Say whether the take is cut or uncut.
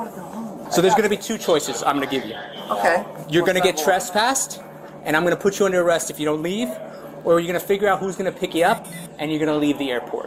uncut